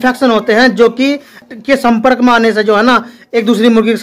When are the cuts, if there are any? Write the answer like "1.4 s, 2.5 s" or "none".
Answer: 1.4 s